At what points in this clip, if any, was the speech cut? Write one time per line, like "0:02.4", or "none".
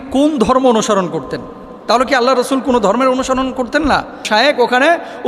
0:04.3